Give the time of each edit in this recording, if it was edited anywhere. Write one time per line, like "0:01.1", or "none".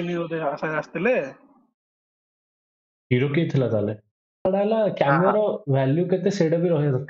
0:04.4